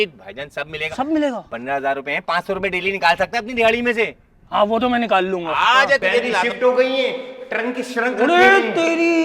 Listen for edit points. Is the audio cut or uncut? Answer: cut